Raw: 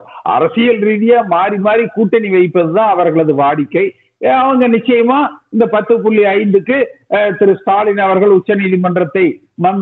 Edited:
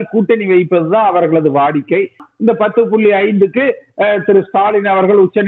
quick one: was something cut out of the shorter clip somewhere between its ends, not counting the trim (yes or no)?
yes